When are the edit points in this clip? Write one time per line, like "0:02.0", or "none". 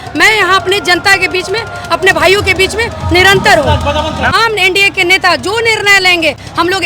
0:04.3